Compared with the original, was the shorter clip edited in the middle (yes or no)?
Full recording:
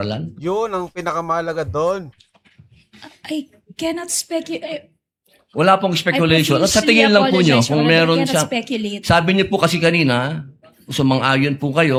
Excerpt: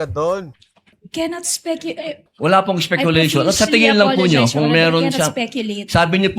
yes